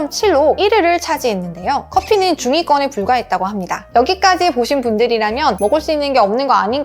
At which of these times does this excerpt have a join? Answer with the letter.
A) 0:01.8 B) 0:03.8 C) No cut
B